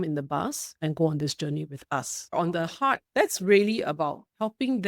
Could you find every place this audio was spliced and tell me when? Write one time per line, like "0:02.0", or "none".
0:03.0